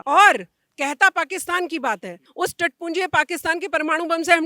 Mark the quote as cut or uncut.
cut